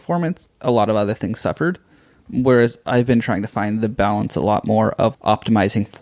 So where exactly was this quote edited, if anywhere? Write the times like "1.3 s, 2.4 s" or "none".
none